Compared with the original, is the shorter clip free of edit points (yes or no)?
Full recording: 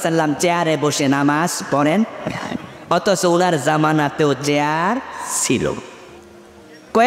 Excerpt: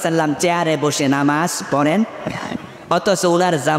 yes